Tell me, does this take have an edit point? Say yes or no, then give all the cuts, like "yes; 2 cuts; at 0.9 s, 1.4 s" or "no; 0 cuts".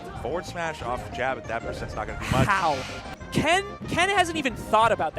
yes; 1 cut; at 3.0 s